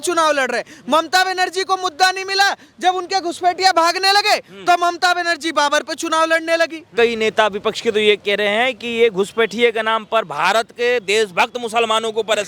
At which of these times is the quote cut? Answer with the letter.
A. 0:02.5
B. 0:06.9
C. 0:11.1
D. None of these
B